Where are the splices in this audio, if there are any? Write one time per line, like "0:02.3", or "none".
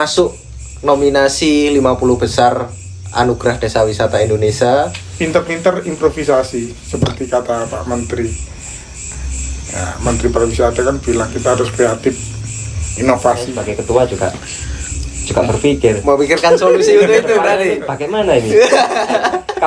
0:05.0
0:13.6